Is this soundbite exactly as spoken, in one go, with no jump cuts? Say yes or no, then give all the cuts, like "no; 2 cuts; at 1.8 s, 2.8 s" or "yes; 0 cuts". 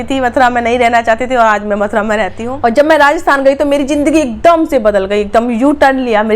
no; 1 cut; at 2.4 s